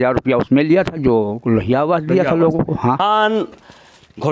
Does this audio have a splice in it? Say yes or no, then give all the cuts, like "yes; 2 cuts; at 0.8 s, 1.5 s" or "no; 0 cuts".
yes; 1 cut; at 3.0 s